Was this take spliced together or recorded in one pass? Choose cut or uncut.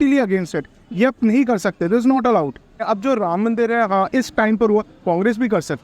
cut